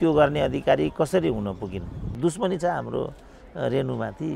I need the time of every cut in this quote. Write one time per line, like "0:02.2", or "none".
0:02.2

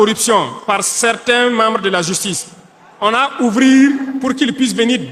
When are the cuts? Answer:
none

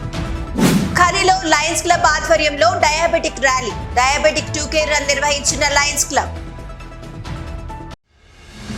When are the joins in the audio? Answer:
none

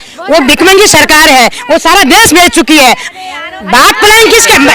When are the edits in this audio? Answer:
0:03.1

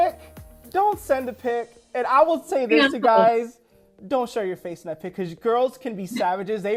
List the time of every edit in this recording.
none

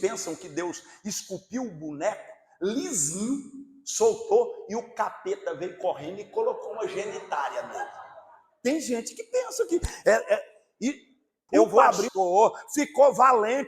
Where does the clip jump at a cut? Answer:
0:12.1

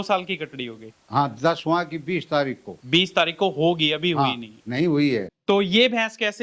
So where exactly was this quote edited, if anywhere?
0:05.3

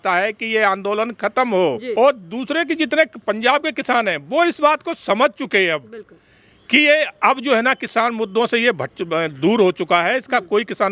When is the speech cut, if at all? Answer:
0:01.8

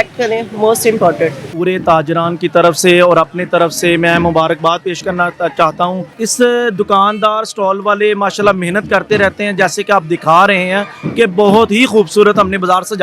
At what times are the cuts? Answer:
0:01.5
0:06.1

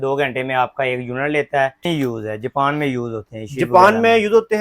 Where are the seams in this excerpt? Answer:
0:01.8

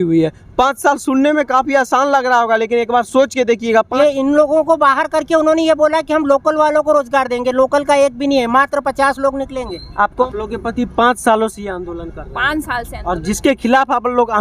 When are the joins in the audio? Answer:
0:03.9
0:10.2

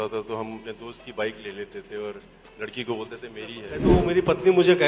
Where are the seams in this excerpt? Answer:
0:03.8

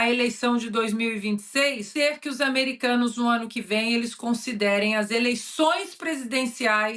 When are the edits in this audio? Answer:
0:01.9

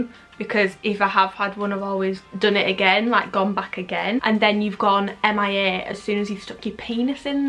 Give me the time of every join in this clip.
0:04.2

